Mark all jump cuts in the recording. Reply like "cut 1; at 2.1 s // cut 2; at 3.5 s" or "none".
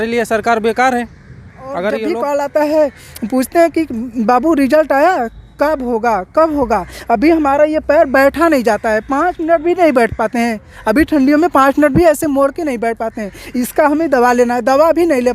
cut 1; at 1.8 s